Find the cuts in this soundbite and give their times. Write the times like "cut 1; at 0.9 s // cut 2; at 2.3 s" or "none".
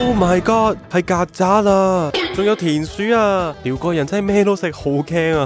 cut 1; at 2.2 s // cut 2; at 3.6 s